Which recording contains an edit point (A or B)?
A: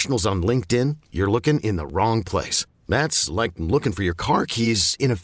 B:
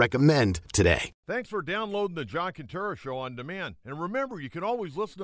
B